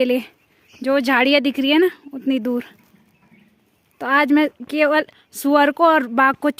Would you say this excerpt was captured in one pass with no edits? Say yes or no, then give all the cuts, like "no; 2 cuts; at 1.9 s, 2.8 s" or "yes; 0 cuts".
yes; 0 cuts